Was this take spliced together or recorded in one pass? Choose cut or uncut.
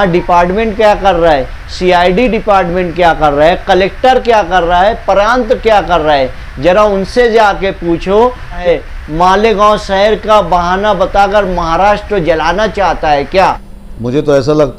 cut